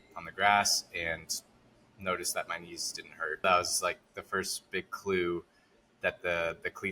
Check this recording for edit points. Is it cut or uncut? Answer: cut